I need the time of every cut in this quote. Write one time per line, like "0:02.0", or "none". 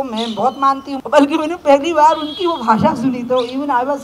0:00.9